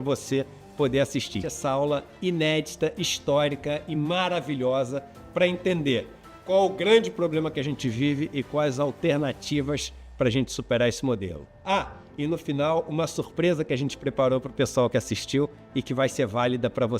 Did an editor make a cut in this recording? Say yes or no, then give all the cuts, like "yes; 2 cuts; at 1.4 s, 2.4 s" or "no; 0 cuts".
yes; 1 cut; at 1.4 s